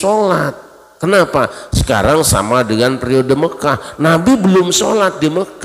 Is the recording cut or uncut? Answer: uncut